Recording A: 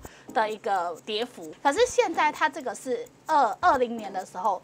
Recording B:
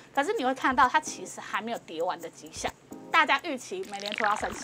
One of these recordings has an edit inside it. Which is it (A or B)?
B